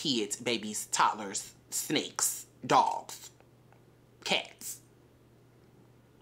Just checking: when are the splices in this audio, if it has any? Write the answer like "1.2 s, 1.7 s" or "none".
none